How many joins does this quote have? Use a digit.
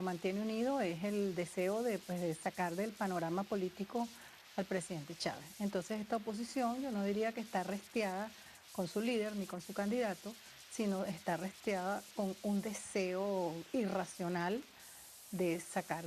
0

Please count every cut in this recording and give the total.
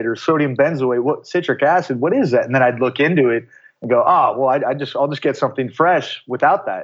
0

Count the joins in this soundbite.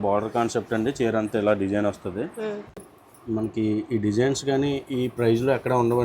1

